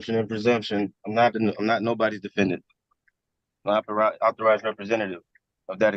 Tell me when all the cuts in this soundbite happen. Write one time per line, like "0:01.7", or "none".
none